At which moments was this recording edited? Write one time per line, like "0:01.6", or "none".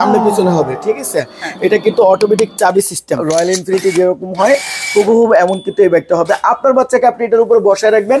0:03.2